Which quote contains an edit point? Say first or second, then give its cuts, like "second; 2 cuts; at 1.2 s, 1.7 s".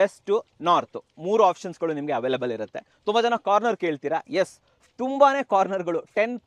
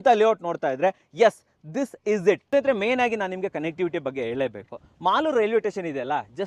second; 1 cut; at 2.4 s